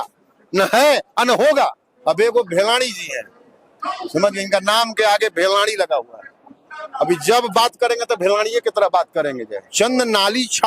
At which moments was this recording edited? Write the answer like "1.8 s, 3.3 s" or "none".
1.9 s, 9.6 s